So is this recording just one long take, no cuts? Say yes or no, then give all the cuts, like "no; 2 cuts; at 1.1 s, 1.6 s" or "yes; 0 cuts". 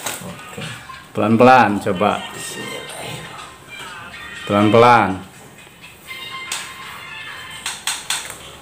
yes; 0 cuts